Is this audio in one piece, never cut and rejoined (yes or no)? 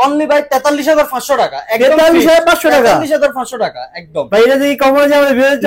yes